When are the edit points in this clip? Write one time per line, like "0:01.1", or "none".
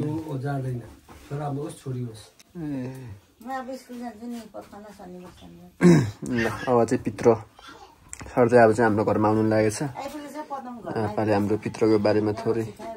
none